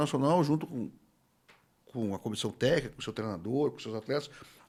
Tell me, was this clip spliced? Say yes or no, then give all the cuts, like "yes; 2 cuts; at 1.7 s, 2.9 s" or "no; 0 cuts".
no; 0 cuts